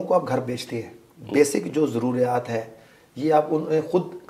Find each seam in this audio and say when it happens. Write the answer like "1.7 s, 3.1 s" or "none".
none